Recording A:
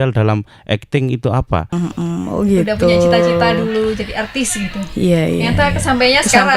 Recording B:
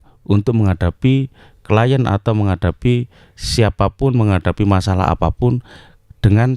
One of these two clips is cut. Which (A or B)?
A